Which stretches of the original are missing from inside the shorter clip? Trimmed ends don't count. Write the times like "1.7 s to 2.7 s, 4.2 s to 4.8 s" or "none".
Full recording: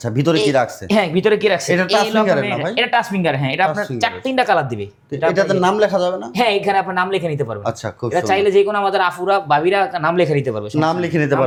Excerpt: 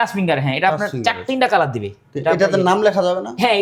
none